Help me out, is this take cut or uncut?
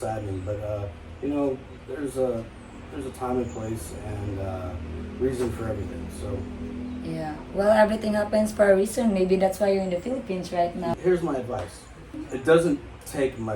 cut